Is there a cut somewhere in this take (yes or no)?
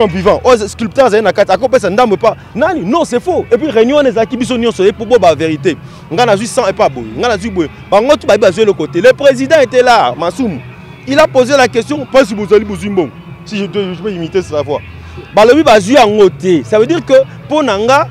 no